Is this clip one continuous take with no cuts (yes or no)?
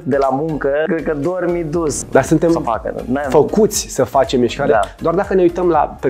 no